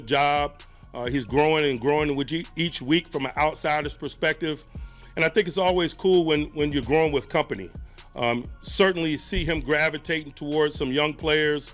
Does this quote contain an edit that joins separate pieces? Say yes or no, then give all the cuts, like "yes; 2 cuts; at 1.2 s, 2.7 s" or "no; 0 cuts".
no; 0 cuts